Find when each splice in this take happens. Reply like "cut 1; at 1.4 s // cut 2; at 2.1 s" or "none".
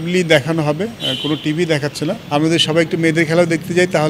cut 1; at 2.2 s